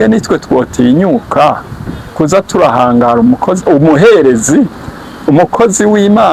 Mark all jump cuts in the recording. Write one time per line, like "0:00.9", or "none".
none